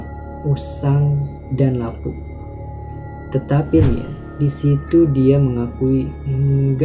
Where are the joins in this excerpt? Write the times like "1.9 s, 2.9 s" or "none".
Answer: none